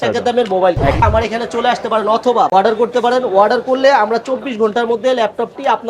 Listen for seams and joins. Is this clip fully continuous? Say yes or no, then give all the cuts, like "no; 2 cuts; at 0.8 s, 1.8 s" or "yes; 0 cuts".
no; 2 cuts; at 1.0 s, 2.5 s